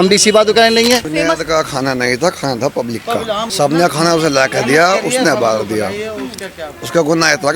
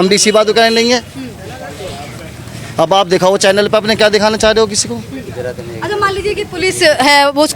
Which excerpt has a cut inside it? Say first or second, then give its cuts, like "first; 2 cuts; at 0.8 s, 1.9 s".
first; 2 cuts; at 1.1 s, 3.5 s